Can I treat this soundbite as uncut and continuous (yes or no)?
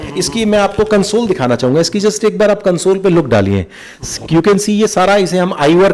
yes